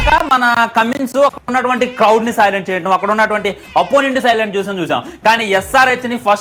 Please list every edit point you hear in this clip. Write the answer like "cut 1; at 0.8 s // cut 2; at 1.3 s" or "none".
none